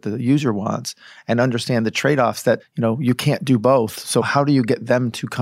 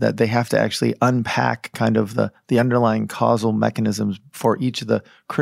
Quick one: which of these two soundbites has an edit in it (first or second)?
first